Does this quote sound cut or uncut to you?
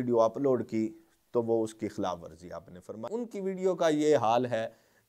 cut